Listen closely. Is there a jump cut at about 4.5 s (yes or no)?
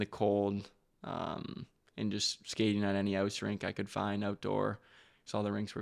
no